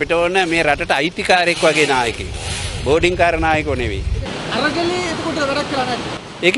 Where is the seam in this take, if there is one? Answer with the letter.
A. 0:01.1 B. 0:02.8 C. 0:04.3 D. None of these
C